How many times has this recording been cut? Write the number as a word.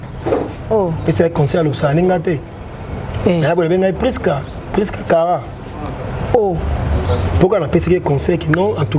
one